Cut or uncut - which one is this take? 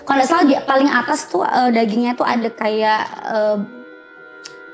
uncut